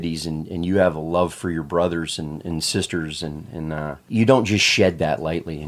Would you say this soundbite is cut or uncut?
cut